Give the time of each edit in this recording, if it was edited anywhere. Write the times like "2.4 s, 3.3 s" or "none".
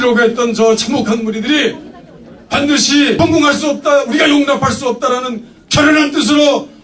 3.2 s